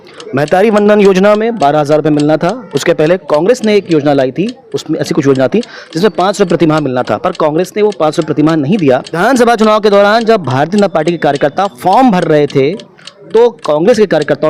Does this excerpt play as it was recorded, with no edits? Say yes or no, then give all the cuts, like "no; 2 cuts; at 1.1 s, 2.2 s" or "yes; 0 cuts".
no; 1 cut; at 9.1 s